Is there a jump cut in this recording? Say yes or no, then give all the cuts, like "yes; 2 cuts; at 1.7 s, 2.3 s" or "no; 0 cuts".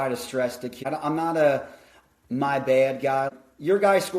yes; 2 cuts; at 0.8 s, 3.3 s